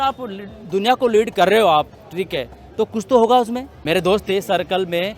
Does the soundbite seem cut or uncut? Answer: cut